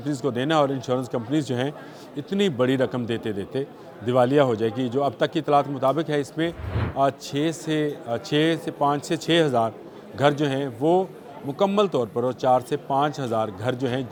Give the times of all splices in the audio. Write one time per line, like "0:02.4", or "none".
none